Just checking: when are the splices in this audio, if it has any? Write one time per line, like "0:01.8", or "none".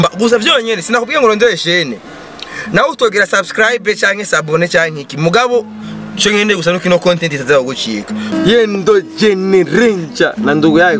0:08.3